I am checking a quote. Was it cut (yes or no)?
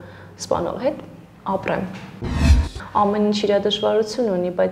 yes